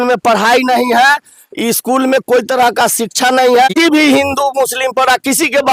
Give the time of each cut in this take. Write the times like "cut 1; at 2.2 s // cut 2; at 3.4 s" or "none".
cut 1; at 3.7 s